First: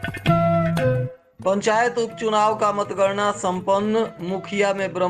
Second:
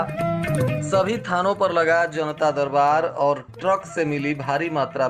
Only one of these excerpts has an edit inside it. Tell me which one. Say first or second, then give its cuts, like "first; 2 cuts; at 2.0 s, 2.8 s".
first; 1 cut; at 1.1 s